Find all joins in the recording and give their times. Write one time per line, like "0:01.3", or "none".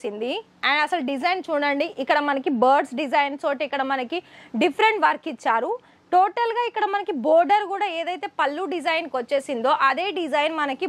none